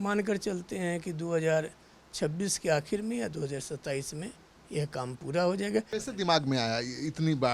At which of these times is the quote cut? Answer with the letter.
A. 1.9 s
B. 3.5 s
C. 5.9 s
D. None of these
C